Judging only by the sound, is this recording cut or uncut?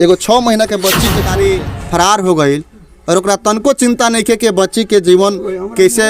cut